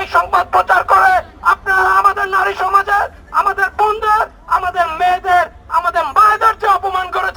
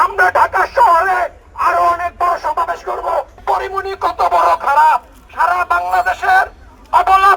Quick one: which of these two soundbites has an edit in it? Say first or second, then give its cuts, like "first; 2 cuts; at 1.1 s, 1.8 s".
second; 1 cut; at 3.3 s